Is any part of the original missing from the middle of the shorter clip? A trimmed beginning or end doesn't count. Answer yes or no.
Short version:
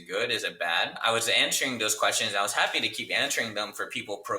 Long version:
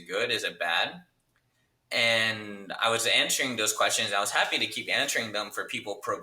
yes